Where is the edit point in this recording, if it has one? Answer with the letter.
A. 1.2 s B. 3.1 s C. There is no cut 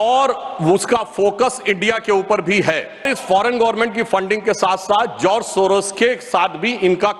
B